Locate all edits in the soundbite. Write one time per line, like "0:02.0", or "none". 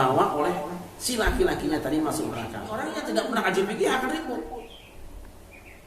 0:02.8

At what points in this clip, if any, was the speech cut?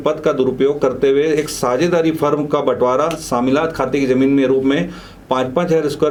none

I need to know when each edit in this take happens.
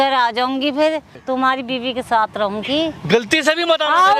0:01.1

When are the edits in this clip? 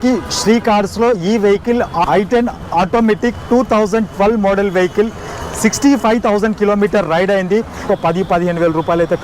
0:02.0
0:07.9

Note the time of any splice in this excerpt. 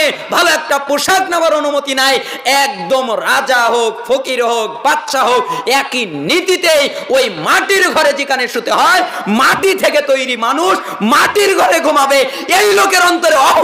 none

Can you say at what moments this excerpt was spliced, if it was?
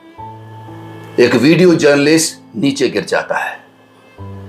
0:01.1

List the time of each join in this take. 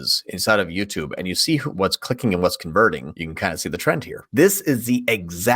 0:01.7
0:03.2
0:04.2

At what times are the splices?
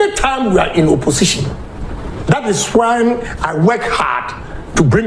none

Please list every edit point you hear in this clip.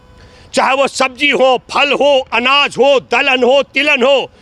none

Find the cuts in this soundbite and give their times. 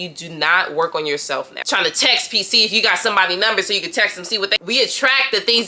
0:01.7
0:04.6

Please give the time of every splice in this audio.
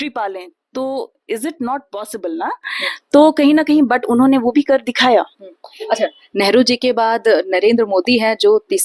none

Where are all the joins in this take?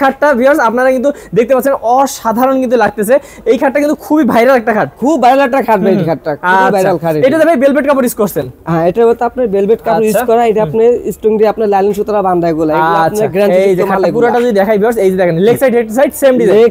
none

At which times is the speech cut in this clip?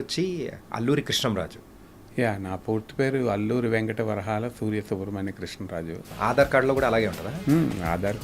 0:06.1

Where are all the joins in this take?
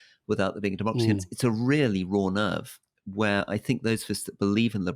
0:01.2

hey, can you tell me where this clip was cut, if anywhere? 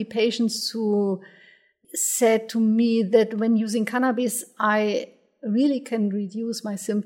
0:01.7

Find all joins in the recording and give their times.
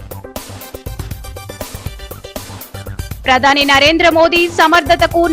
0:02.7

